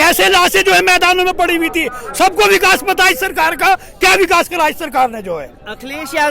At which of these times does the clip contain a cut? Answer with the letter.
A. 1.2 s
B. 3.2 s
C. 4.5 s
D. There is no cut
D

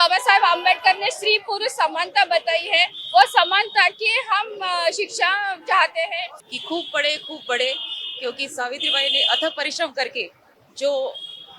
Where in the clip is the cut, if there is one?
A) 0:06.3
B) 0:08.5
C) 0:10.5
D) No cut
A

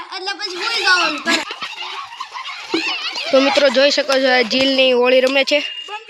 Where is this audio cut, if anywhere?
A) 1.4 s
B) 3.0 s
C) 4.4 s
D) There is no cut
A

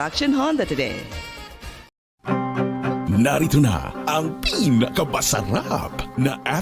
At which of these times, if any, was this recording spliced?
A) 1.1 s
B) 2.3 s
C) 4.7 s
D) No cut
B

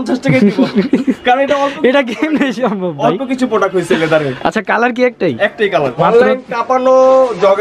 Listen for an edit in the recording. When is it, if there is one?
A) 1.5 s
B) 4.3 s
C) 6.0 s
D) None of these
C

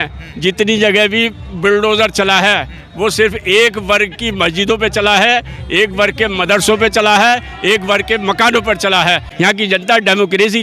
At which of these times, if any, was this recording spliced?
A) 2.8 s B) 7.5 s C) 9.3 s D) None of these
C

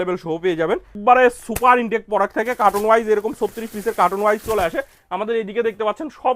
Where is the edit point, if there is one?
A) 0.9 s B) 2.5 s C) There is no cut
A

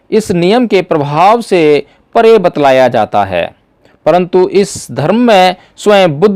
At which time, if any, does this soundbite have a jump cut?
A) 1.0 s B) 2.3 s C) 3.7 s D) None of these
D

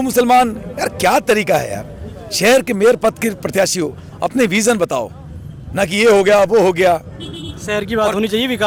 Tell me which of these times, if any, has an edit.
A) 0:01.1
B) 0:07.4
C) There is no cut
C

